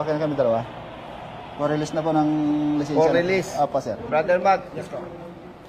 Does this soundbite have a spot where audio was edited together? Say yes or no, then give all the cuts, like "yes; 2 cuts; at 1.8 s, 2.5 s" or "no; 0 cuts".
yes; 1 cut; at 4.0 s